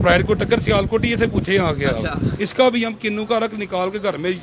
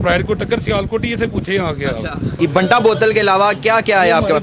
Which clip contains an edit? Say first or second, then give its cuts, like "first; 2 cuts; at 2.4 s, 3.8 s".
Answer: first; 1 cut; at 2.3 s